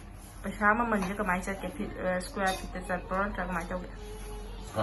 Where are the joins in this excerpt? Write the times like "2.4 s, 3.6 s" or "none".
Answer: none